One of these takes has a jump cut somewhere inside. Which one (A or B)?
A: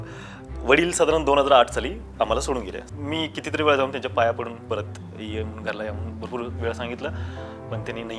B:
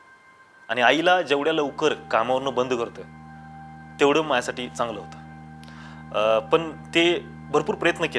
A